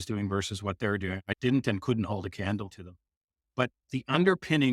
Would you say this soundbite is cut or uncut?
cut